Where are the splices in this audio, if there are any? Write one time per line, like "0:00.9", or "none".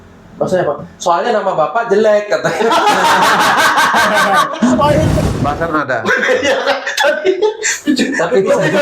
0:05.1

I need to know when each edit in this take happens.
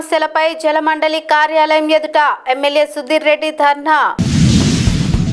none

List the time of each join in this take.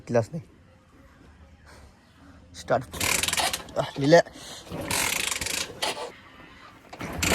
0:02.9
0:06.1

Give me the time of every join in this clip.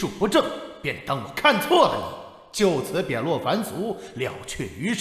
none

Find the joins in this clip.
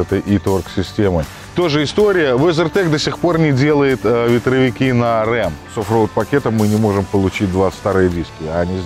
0:01.4
0:05.8

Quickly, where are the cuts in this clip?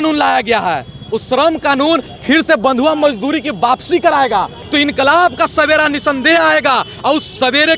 0:04.6

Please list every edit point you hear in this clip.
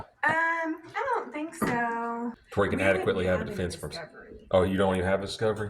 0:02.4

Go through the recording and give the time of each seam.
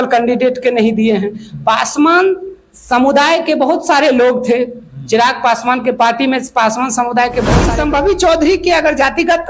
0:07.6

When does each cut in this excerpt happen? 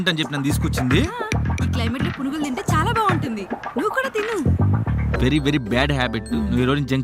0:05.2

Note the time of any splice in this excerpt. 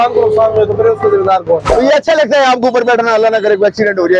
0:01.6

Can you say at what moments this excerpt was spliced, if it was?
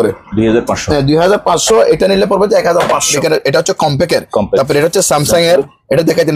0:03.1

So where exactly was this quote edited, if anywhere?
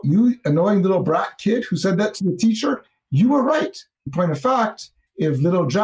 0:04.1

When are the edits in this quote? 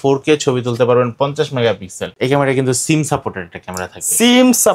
0:02.1

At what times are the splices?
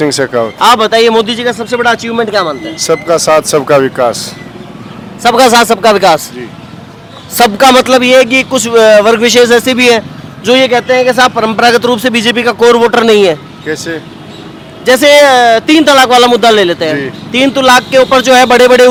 none

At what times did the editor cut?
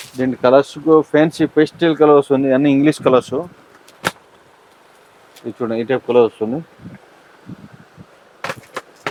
none

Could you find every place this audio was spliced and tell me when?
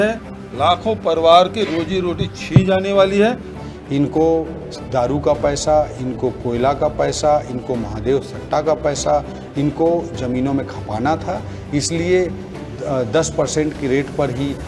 0:03.6

